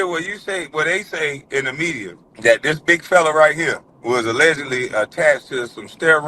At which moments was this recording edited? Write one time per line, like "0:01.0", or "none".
0:02.2
0:03.9